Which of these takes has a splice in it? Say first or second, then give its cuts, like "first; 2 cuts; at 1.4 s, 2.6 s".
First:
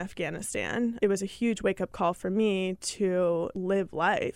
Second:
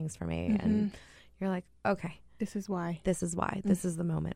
first; 2 cuts; at 1.0 s, 3.5 s